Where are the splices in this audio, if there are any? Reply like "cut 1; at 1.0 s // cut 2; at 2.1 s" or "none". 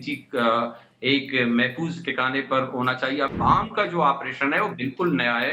cut 1; at 3.3 s